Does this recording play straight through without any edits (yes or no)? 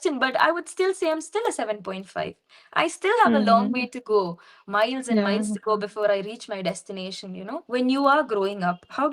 no